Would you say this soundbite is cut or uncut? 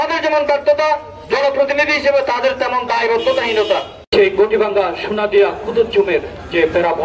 cut